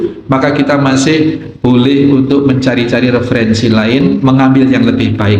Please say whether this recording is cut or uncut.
cut